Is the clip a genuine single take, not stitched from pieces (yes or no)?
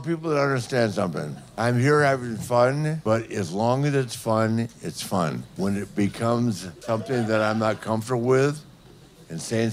no